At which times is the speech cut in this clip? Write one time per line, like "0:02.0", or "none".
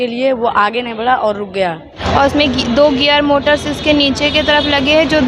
0:02.0